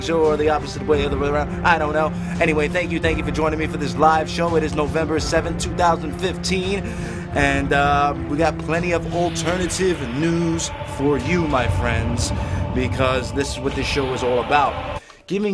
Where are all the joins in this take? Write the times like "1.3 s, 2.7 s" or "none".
13.0 s